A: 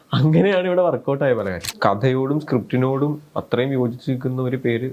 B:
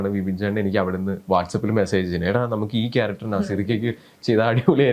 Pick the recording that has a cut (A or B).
A